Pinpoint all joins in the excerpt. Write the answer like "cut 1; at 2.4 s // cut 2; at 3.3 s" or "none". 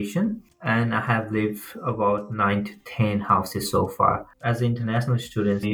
cut 1; at 4.3 s